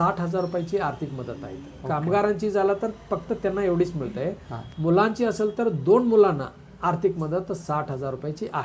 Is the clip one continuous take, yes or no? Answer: yes